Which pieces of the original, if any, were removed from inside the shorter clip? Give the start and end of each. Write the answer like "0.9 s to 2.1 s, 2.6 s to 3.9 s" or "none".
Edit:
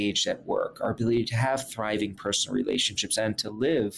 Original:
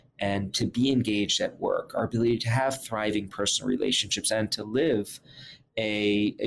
none

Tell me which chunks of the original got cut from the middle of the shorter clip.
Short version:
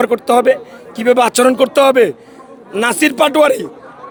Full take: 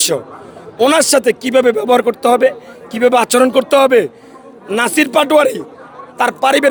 none

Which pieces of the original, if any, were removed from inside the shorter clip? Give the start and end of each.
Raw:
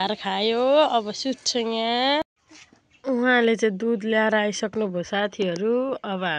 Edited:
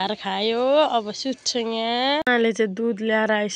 2.3 s to 3.3 s

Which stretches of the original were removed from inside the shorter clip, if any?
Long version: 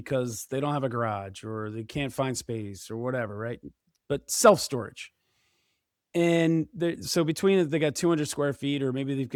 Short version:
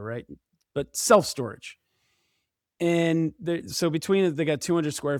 none

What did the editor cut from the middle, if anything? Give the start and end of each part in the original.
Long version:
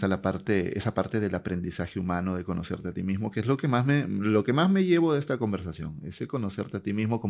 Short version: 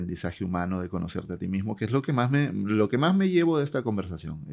none

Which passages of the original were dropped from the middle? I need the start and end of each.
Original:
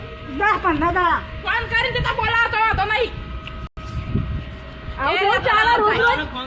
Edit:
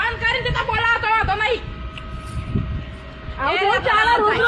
3.7 s to 3.8 s

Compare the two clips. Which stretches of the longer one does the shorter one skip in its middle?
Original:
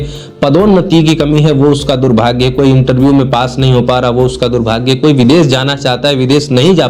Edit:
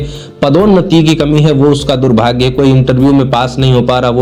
none

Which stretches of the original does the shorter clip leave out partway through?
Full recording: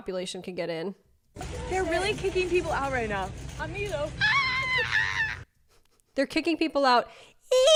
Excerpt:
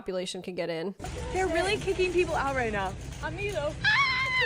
1.1 s to 1.5 s

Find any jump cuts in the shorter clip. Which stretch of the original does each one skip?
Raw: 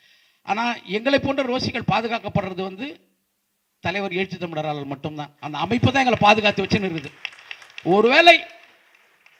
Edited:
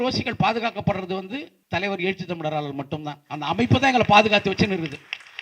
3.0 s to 3.6 s

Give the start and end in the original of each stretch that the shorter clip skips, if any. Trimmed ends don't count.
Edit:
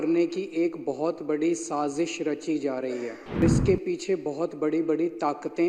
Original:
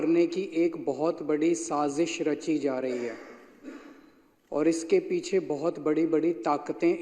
3.4 s to 4.6 s

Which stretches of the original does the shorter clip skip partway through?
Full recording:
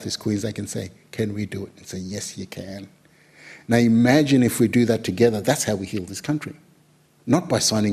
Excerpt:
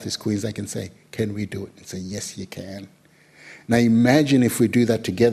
none

